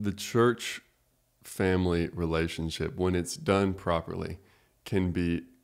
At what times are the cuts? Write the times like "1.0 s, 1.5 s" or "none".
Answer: none